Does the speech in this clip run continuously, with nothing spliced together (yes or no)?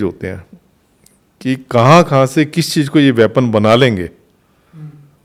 yes